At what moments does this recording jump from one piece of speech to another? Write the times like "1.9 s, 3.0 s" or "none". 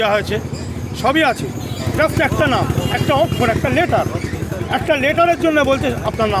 1.9 s